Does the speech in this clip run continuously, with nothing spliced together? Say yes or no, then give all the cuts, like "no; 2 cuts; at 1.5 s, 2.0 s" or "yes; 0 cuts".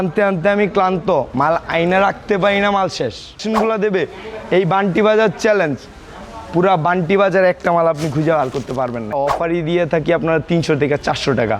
no; 2 cuts; at 3.4 s, 9.1 s